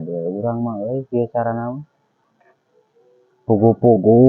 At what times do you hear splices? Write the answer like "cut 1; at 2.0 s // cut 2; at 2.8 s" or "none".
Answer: cut 1; at 2.2 s